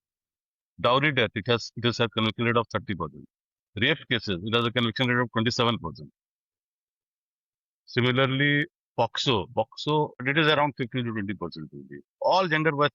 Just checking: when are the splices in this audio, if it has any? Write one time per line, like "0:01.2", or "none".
0:10.2

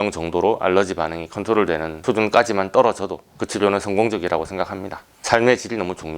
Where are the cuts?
0:05.0

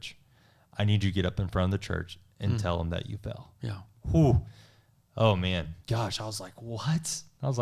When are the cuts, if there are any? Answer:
0:05.8

